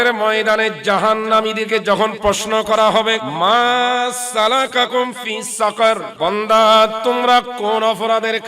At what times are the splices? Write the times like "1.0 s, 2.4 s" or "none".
3.3 s, 6.1 s